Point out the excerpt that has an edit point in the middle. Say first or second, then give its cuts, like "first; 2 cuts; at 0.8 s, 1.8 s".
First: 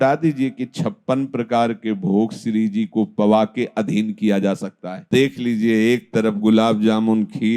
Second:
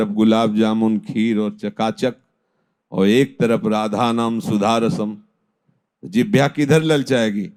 first; 1 cut; at 5.0 s